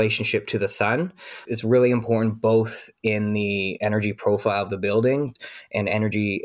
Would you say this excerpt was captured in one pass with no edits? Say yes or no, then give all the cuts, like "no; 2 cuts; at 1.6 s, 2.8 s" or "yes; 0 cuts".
no; 2 cuts; at 3.7 s, 5.3 s